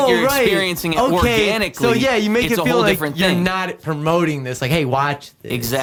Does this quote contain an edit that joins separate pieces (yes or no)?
no